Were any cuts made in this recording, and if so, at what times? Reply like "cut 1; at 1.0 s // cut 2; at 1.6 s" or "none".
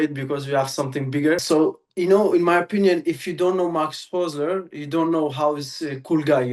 cut 1; at 1.4 s